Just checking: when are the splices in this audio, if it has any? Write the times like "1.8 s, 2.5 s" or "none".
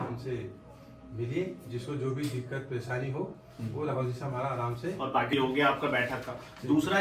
5.3 s